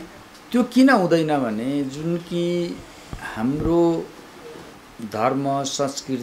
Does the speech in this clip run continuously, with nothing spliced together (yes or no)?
yes